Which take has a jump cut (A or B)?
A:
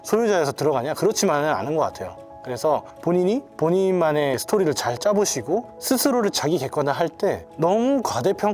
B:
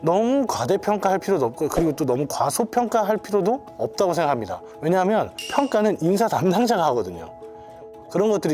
B